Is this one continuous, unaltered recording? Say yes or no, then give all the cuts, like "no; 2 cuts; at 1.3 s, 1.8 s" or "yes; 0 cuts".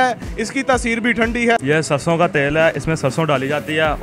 no; 1 cut; at 1.6 s